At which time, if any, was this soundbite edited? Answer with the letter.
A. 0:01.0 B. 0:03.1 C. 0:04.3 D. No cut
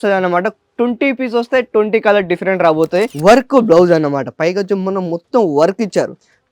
B